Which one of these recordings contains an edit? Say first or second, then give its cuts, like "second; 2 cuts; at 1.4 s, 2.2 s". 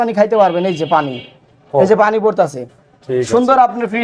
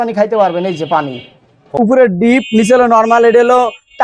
second; 1 cut; at 1.7 s